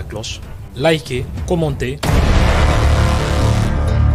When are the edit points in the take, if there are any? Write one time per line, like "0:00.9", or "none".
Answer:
none